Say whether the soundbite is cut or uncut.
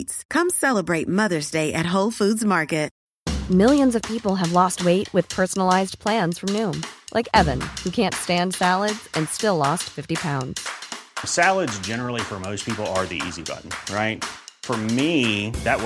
cut